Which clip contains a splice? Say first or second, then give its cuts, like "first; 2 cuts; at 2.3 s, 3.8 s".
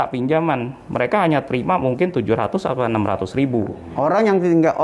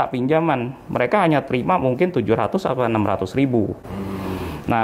first; 1 cut; at 3.8 s